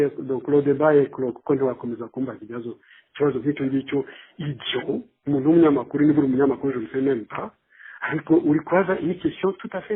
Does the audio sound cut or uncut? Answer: uncut